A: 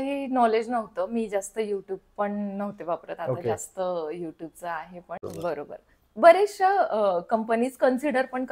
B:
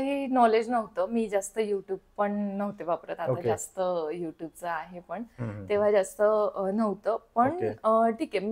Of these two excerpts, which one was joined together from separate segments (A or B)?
A